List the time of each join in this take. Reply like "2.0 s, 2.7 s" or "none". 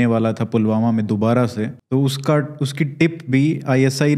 1.8 s